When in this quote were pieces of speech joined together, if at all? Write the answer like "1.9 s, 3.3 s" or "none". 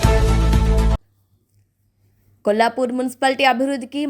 1.0 s